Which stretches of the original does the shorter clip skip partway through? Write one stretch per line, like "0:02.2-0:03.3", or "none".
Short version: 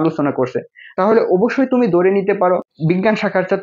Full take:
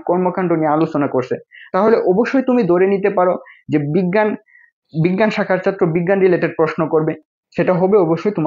0:03.5-0:04.9